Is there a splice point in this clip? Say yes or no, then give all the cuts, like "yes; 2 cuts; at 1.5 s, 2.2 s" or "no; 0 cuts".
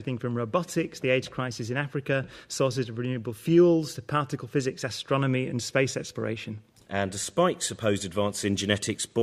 yes; 1 cut; at 2.8 s